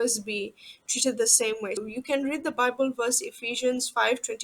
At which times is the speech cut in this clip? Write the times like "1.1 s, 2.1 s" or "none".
1.8 s